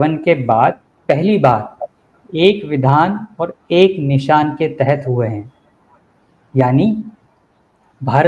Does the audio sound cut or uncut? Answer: uncut